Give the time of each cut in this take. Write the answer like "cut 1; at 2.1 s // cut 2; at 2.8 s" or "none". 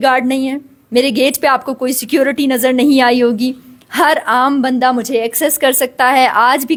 none

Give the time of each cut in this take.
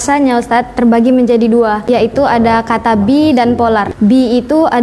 cut 1; at 1.8 s // cut 2; at 3.9 s

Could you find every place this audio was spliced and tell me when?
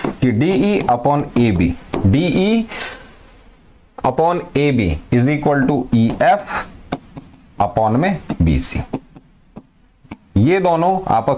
none

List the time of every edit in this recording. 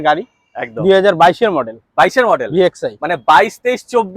none

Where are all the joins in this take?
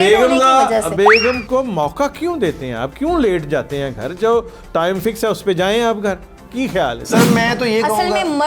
none

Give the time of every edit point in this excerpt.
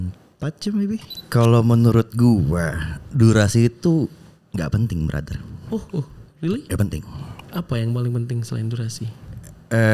cut 1; at 1.2 s

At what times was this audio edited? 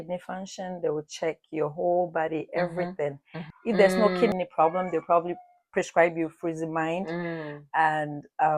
cut 1; at 3.5 s // cut 2; at 4.3 s

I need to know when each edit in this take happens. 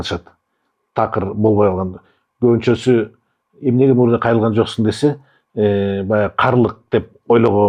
none

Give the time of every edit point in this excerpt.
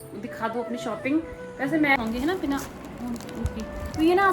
cut 1; at 2.0 s

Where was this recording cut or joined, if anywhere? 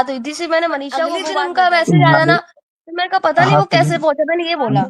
cut 1; at 1.2 s

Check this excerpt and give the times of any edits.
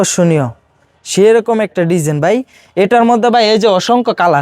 none

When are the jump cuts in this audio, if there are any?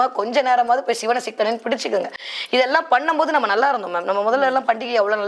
none

